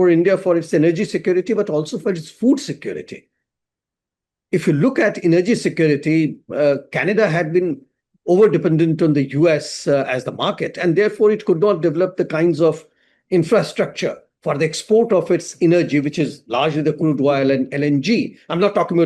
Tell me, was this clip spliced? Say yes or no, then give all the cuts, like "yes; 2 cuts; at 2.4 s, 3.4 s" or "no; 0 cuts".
no; 0 cuts